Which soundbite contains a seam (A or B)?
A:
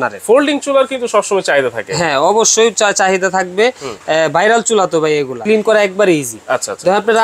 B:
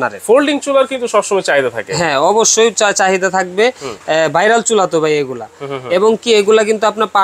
A